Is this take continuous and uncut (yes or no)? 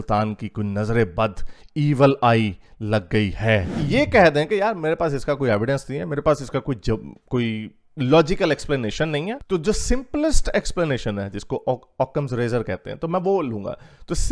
no